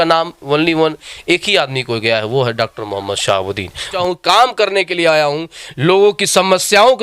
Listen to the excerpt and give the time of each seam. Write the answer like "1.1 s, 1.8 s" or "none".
3.9 s